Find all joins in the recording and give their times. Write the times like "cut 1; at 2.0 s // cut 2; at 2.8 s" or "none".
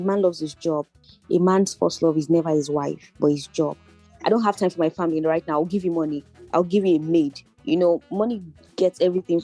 cut 1; at 4.1 s